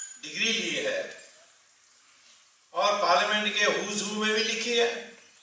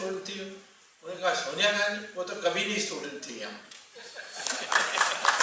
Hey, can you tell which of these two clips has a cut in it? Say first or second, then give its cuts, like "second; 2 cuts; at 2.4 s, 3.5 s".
first; 1 cut; at 1.2 s